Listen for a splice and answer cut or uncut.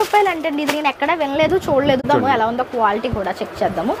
cut